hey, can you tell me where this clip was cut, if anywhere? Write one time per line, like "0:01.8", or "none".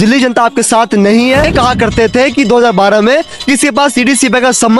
0:01.5